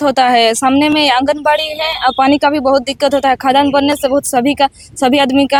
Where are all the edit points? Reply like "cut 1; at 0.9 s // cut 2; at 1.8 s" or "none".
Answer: none